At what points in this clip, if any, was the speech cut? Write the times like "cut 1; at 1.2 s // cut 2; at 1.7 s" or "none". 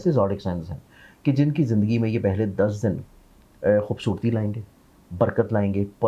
none